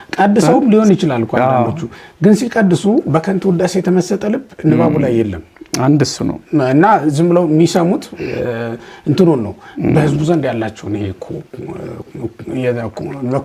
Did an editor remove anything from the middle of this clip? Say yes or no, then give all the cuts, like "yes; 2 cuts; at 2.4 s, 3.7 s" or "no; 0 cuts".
no; 0 cuts